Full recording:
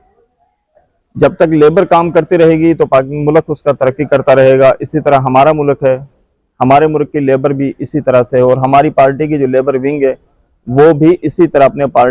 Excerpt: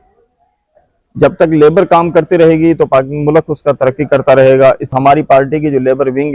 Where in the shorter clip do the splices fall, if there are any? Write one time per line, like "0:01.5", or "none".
0:04.9